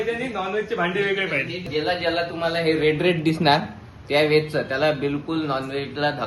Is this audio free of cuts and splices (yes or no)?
no